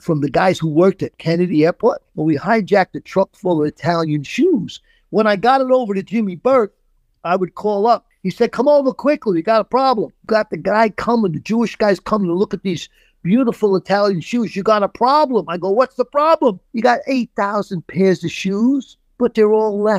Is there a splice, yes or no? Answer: yes